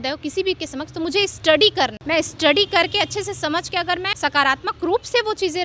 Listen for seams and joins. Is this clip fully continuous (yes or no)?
no